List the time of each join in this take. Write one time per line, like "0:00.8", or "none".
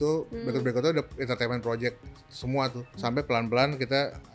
0:03.0